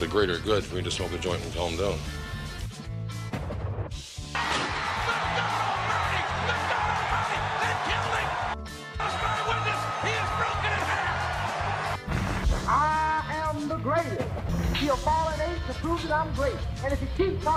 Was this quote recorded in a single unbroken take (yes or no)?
yes